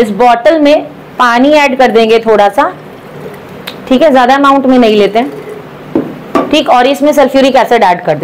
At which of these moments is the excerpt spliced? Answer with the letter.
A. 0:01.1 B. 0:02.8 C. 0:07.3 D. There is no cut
D